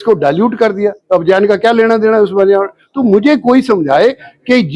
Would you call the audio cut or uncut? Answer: uncut